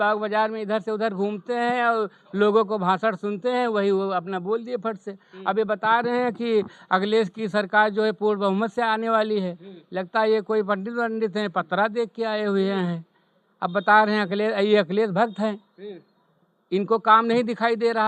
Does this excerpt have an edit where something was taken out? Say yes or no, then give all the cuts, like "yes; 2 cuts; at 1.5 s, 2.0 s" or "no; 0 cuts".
no; 0 cuts